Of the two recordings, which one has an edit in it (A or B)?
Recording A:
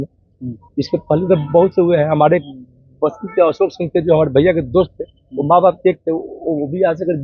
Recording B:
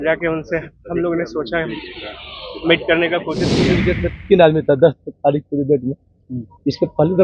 B